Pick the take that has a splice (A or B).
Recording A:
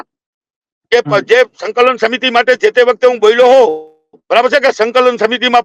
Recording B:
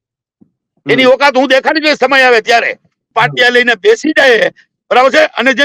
B